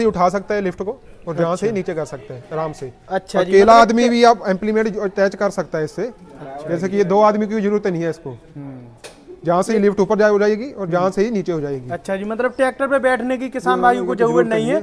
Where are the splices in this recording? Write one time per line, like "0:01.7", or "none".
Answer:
none